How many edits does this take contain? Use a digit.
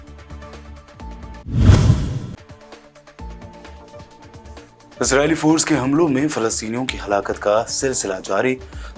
1